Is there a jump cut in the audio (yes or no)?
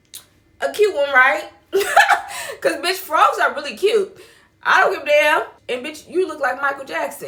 no